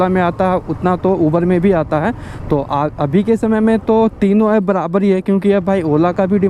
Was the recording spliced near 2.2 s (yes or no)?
no